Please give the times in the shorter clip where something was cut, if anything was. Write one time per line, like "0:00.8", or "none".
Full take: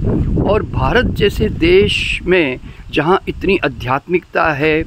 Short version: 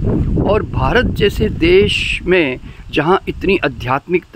none